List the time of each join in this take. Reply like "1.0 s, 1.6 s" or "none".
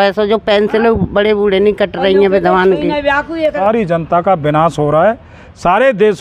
3.6 s